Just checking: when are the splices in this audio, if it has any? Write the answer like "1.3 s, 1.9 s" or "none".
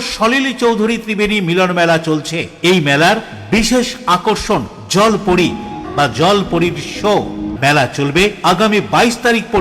5.8 s, 7.5 s